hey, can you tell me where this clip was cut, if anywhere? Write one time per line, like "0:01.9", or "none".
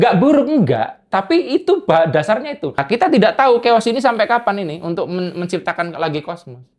0:02.8